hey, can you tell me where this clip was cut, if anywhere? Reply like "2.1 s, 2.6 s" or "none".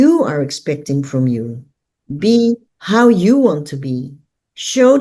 2.7 s